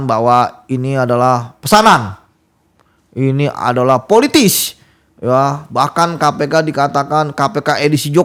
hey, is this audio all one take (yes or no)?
yes